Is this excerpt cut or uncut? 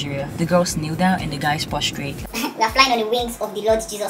cut